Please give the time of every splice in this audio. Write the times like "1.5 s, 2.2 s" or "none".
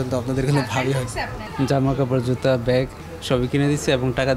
none